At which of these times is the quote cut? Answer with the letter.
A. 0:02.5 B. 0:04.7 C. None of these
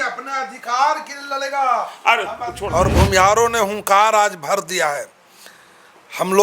A